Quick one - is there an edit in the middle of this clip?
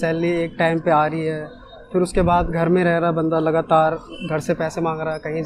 no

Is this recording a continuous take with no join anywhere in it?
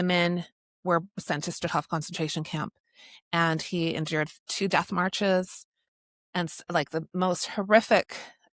yes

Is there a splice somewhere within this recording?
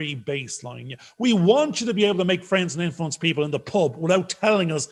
no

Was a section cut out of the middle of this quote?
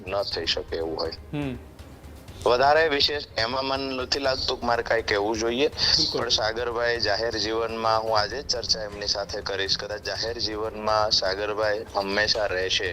no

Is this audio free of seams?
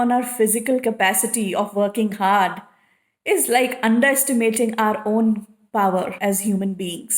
no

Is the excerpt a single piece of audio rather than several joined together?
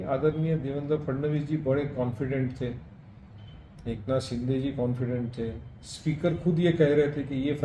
yes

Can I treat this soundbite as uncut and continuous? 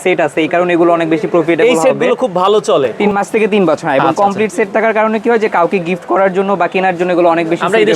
no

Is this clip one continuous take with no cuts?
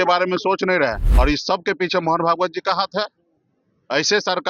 no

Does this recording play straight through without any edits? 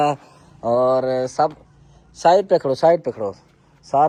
yes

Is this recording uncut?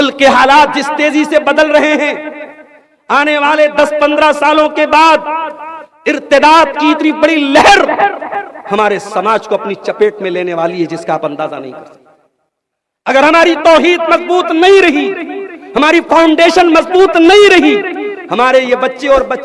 yes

